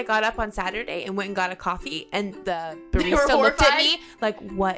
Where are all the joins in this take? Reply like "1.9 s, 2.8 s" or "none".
2.4 s